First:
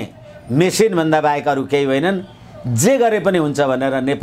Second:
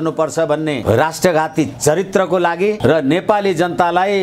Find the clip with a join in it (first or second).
second